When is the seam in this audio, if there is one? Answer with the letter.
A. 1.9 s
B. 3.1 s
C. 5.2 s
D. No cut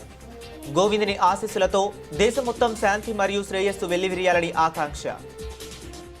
C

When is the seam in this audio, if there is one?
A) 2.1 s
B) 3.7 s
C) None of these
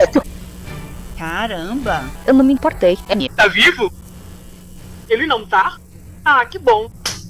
A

